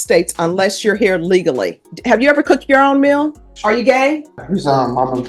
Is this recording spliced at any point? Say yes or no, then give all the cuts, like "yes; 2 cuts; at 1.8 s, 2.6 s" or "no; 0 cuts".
yes; 3 cuts; at 1.9 s, 3.5 s, 4.4 s